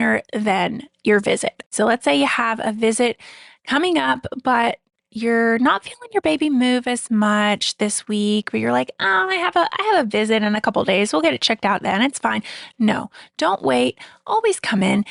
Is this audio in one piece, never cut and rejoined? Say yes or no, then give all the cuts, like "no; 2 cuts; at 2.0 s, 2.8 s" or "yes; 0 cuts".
yes; 0 cuts